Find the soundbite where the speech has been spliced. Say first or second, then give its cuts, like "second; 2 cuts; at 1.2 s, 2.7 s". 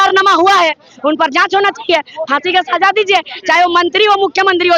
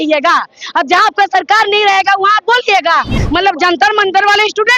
second; 1 cut; at 3.2 s